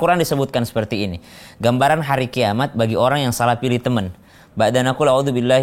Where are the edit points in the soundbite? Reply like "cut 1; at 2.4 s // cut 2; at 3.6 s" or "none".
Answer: none